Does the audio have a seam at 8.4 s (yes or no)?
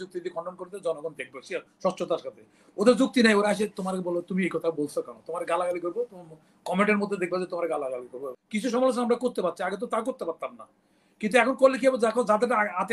yes